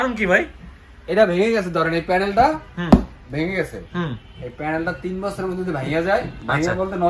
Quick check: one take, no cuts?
yes; 0 cuts

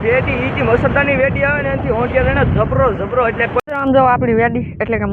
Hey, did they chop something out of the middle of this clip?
yes; 1 cut; at 3.6 s

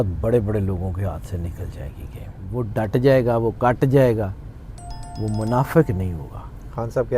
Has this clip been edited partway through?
yes; 1 cut; at 2.4 s

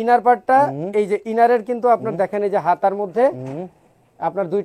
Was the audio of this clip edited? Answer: no; 0 cuts

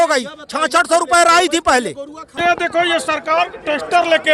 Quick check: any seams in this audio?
yes; 1 cut; at 2.2 s

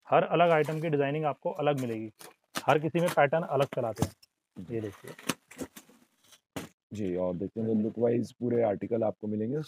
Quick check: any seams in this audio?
no; 0 cuts

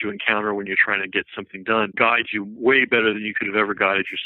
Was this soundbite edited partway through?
yes; 1 cut; at 1.9 s

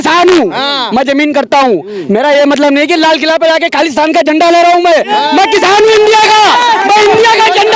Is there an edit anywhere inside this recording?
no; 0 cuts

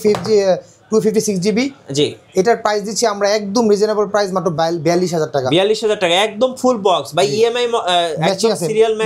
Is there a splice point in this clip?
no; 0 cuts

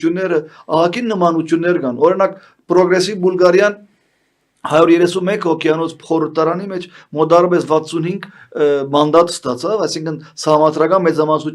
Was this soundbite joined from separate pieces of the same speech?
no; 0 cuts

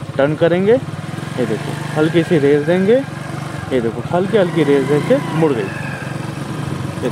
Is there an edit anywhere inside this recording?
no; 0 cuts

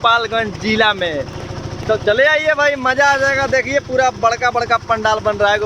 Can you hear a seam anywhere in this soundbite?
no; 0 cuts

